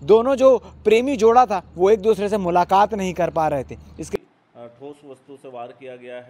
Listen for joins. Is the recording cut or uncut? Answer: cut